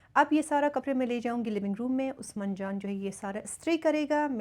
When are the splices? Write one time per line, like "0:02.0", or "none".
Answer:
none